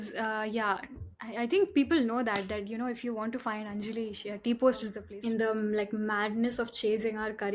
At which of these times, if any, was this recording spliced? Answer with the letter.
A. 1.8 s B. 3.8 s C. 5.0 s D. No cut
C